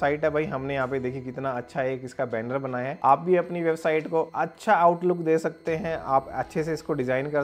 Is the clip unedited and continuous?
yes; 0 cuts

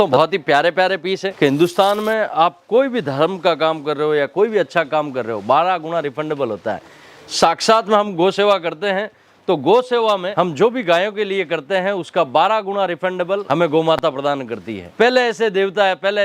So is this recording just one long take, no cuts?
no; 2 cuts; at 1.2 s, 14.9 s

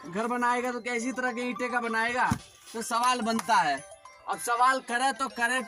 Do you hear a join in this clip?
no; 0 cuts

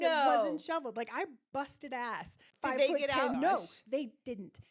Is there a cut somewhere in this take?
yes; 2 cuts; at 2.4 s, 3.3 s

